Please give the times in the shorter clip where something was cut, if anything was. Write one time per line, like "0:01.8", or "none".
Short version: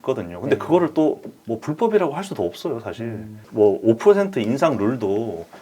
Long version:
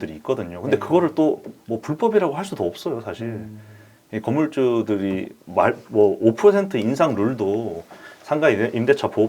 0:03.4